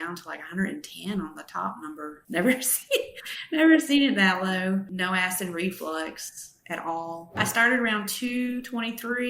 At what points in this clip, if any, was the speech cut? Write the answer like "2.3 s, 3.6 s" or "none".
none